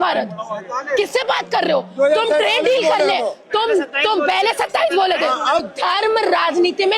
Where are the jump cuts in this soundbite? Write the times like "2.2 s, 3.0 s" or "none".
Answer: 5.6 s